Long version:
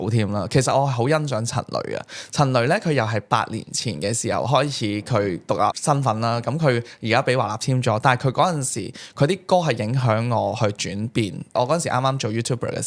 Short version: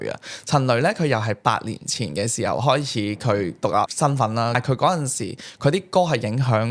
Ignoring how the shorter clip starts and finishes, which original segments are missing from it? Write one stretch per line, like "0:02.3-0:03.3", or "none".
0:06.4-0:08.1

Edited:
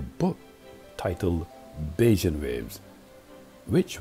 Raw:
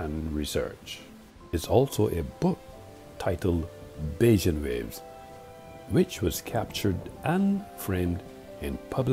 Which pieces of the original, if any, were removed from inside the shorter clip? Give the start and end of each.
none

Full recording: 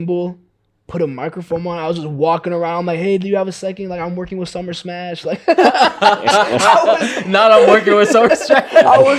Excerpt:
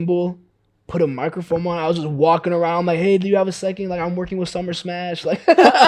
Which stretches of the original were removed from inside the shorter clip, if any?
none

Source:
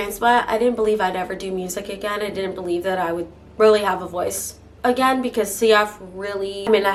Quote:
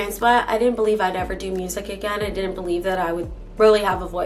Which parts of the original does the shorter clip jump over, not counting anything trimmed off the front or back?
none

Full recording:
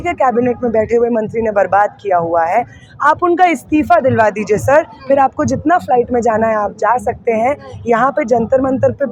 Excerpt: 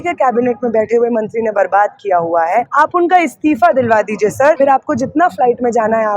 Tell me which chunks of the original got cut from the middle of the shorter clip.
0:02.7-0:03.0
0:04.8-0:05.1

